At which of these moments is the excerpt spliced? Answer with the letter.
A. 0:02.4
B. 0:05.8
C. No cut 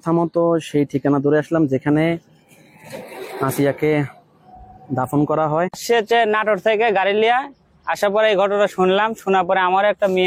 B